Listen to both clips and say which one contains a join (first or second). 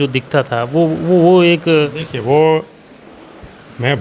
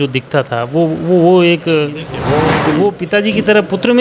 second